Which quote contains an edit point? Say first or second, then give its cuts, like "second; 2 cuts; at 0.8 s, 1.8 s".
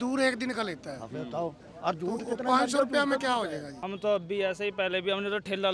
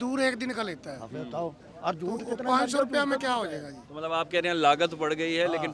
first; 1 cut; at 3.8 s